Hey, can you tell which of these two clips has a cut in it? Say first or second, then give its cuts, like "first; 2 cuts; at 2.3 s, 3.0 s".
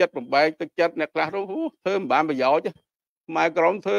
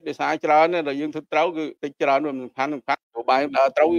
second; 2 cuts; at 1.8 s, 3.1 s